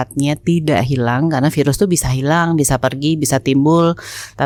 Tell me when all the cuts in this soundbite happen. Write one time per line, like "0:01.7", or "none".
none